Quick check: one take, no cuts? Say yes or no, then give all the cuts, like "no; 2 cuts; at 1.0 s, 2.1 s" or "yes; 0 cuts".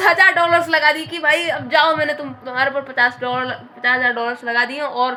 yes; 0 cuts